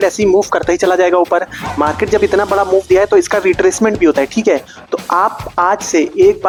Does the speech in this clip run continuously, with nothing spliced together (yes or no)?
yes